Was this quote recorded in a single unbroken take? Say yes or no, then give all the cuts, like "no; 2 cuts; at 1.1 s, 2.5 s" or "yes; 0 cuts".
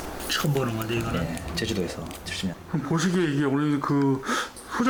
yes; 0 cuts